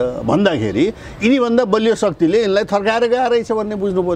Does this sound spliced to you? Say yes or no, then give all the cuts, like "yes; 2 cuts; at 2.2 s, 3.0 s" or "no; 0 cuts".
no; 0 cuts